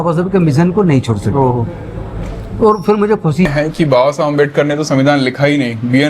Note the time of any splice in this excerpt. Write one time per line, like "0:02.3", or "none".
0:03.5